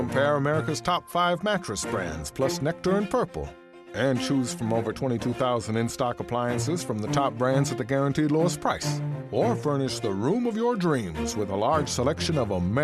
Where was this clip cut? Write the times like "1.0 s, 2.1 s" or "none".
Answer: 11.6 s